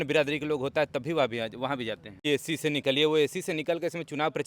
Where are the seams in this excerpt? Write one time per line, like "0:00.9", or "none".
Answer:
0:02.2